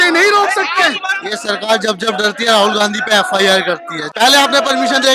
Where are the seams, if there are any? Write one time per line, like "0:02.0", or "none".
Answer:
0:01.1
0:04.0